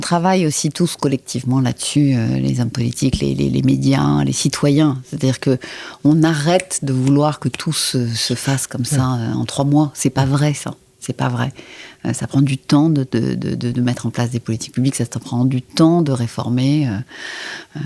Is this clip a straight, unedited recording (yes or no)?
yes